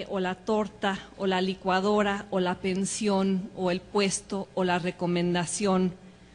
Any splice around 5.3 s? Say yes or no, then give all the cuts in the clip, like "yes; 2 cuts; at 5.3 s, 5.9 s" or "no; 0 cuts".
no; 1 cut; at 3.5 s